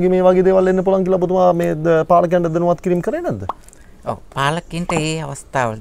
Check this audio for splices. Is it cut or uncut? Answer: uncut